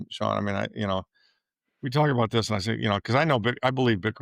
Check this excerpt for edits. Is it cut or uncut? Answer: uncut